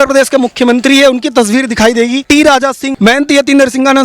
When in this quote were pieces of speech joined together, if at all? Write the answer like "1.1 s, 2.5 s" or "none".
2.5 s